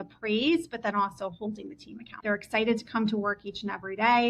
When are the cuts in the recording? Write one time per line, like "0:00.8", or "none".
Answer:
0:02.2

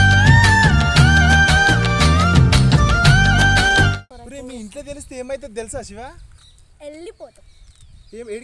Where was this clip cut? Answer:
0:04.1

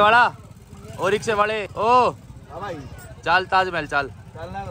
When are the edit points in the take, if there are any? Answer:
0:01.7

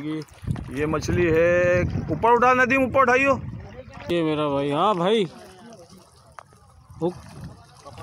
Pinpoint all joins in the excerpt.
0:03.9

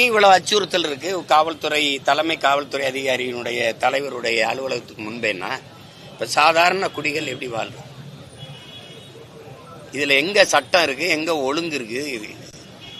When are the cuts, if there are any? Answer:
none

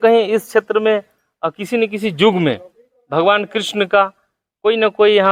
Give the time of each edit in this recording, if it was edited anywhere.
none

